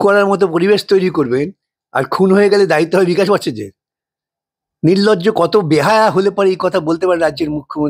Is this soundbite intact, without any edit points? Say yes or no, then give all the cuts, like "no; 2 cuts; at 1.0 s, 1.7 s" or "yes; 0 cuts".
yes; 0 cuts